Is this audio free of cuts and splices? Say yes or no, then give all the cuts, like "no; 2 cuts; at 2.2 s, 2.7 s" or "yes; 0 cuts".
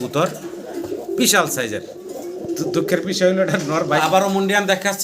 no; 1 cut; at 4.0 s